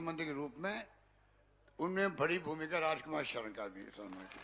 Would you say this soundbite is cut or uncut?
uncut